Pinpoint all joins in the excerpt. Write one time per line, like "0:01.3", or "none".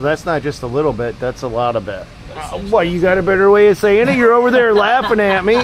0:02.1